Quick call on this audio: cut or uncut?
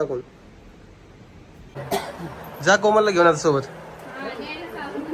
cut